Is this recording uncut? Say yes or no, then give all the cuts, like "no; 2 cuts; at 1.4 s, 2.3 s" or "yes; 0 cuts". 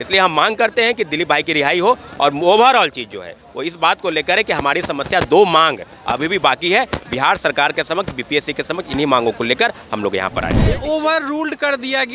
no; 1 cut; at 10.8 s